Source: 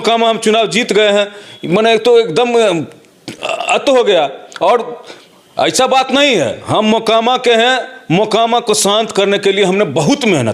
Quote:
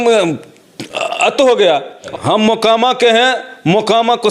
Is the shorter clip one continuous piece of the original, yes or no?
no